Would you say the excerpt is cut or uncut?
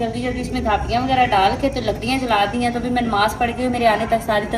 uncut